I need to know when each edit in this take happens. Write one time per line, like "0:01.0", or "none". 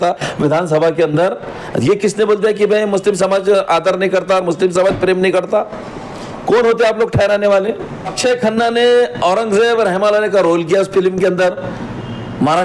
0:08.1